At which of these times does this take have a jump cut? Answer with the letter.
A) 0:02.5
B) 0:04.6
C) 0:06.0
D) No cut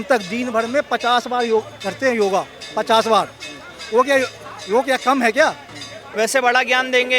C